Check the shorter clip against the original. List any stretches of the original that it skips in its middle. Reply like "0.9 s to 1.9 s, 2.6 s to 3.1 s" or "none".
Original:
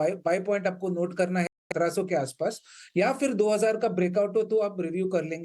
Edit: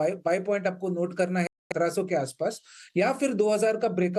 none